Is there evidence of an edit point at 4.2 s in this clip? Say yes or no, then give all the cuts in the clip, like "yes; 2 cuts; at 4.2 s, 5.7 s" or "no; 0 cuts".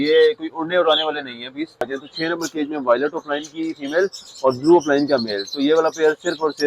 no; 1 cut; at 2.0 s